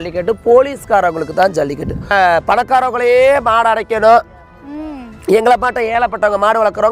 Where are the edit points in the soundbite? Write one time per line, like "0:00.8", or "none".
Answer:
0:02.1

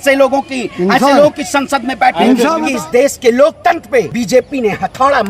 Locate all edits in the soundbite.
0:02.6
0:04.1

